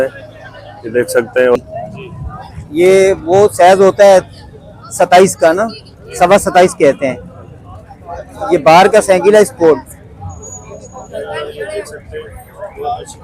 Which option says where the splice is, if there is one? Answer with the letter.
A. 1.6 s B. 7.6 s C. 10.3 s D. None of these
A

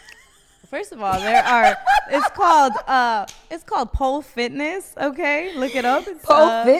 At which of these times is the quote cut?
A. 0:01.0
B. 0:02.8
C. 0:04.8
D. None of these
D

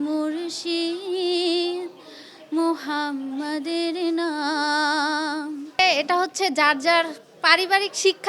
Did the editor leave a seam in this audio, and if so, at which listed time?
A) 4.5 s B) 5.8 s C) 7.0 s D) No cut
B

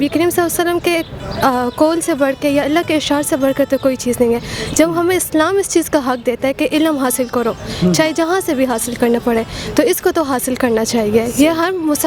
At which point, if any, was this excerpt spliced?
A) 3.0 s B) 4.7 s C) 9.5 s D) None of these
D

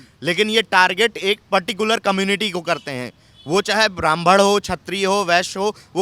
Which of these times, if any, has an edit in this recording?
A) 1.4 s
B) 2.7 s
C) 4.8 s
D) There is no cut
D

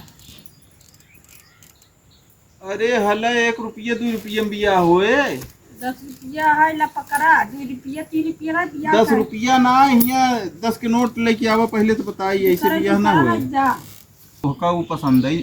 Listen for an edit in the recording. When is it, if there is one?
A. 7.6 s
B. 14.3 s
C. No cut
B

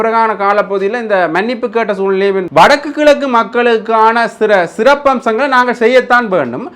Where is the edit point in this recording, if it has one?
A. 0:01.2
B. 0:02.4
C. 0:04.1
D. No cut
B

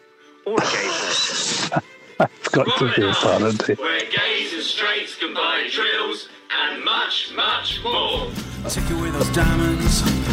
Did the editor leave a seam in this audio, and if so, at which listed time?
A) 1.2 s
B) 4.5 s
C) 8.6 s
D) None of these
C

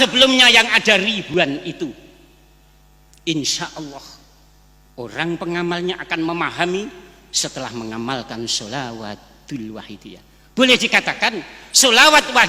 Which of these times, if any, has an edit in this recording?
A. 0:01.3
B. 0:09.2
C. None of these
A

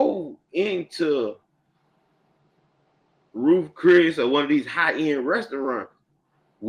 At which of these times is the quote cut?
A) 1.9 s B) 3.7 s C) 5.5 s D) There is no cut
D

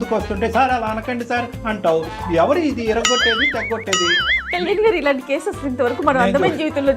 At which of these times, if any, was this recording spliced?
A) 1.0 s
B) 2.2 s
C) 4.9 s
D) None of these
D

